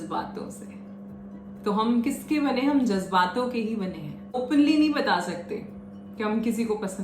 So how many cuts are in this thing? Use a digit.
1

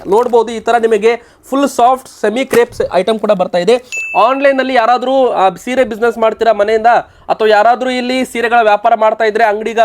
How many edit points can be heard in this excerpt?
1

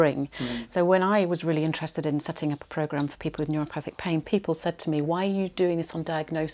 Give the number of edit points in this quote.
1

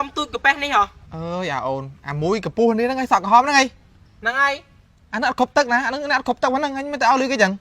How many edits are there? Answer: 1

